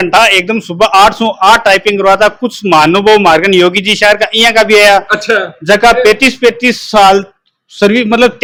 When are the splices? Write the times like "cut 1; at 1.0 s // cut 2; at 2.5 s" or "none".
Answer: none